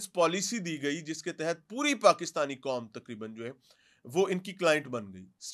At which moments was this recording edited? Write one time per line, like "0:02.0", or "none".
none